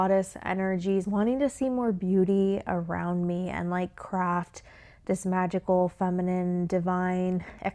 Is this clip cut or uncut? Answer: cut